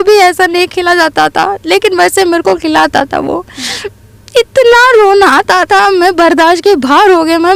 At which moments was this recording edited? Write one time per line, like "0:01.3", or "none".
none

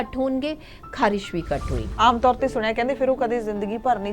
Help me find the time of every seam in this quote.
0:01.8

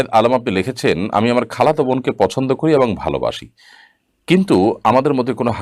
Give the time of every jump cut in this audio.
none

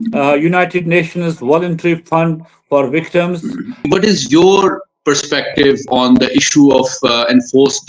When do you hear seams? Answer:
0:03.8

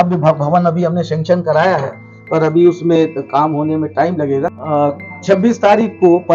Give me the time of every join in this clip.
0:04.6

